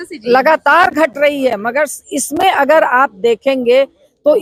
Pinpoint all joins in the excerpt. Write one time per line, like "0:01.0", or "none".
none